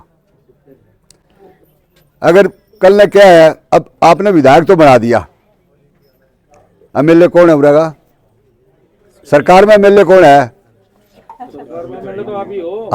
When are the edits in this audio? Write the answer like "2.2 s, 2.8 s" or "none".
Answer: none

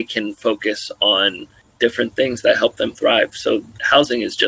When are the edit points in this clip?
none

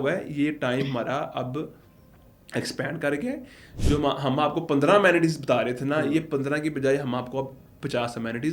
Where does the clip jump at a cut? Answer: none

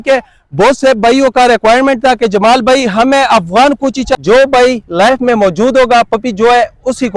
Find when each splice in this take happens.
4.1 s

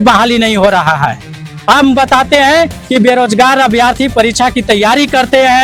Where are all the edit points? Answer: none

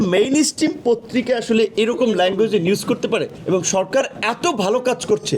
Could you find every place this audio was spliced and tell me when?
3.3 s

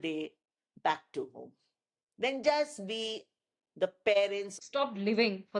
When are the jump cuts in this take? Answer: 4.5 s

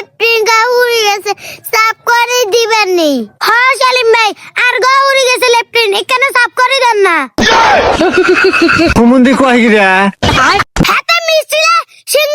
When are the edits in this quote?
10.8 s

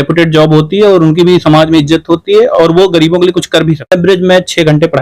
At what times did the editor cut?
3.9 s

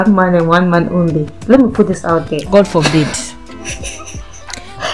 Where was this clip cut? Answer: 1.3 s

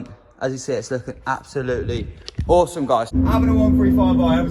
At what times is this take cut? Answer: 3.1 s

